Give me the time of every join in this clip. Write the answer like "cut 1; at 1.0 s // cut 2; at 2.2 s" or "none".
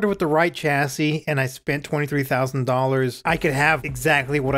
cut 1; at 3.5 s